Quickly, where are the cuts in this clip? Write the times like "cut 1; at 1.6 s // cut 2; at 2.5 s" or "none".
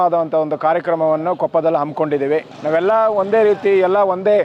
cut 1; at 2.5 s